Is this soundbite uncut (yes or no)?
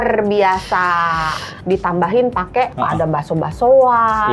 no